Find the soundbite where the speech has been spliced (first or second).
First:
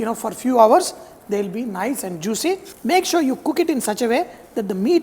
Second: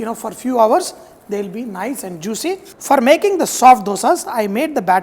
second